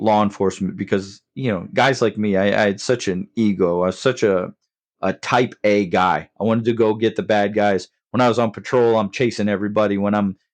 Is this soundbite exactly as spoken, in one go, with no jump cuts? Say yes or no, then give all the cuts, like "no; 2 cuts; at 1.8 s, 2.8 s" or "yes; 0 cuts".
yes; 0 cuts